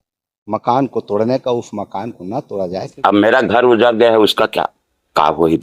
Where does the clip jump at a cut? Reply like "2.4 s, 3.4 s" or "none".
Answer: 2.8 s